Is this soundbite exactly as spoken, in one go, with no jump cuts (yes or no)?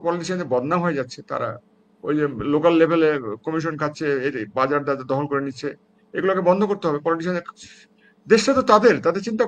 yes